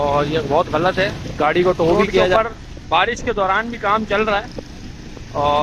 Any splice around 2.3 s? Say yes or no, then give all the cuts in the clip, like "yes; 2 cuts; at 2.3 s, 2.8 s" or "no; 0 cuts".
yes; 1 cut; at 2.3 s